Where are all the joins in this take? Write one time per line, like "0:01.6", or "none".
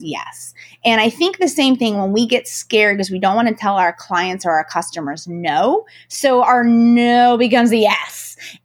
none